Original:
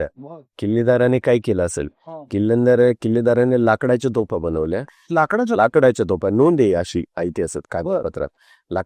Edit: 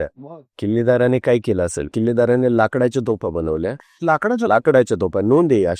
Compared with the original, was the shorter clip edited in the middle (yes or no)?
yes